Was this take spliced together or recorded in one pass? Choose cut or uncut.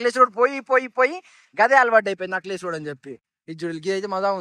cut